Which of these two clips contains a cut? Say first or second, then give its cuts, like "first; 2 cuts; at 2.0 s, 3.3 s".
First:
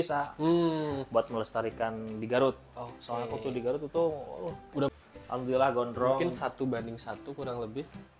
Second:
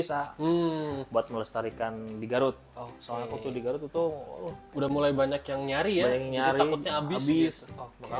first; 1 cut; at 4.9 s